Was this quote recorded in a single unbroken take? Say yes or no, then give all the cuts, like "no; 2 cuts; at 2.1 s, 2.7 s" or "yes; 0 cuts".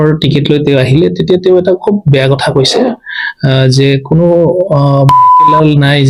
yes; 0 cuts